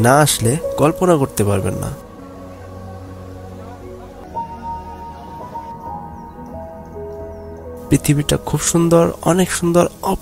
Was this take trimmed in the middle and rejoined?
yes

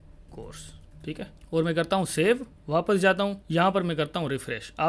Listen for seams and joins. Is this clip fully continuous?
no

